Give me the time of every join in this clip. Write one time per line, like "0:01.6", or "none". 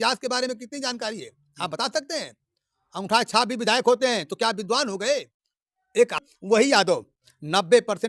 0:06.2